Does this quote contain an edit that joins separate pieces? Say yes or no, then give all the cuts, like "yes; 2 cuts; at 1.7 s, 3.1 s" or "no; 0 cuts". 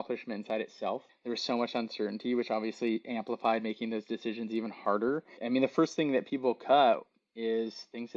yes; 2 cuts; at 1.1 s, 5.3 s